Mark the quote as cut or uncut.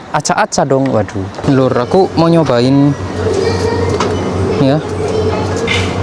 cut